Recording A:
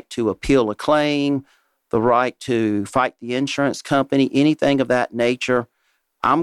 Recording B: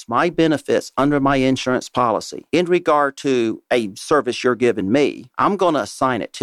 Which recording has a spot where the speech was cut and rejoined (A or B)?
B